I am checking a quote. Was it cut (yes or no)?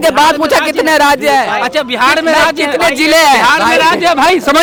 no